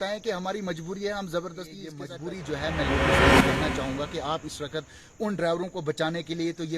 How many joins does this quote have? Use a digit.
1